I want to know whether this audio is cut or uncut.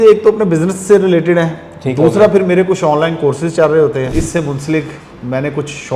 cut